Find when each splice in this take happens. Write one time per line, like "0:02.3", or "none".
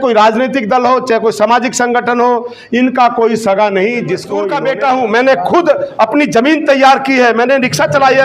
0:04.6